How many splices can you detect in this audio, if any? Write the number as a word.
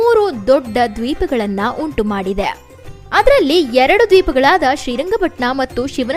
zero